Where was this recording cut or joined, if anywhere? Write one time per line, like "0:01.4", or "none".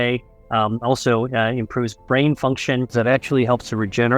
0:02.9